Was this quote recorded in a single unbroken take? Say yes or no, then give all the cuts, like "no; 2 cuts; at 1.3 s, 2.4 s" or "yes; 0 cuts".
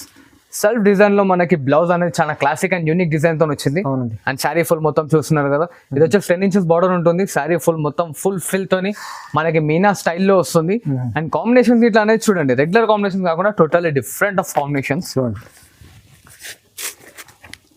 yes; 0 cuts